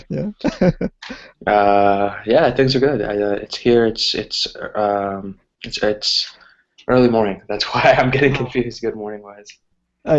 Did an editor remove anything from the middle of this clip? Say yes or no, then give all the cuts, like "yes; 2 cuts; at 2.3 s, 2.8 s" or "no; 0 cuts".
no; 0 cuts